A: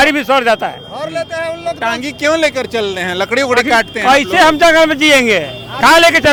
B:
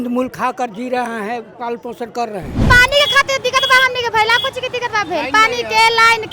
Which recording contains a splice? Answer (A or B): B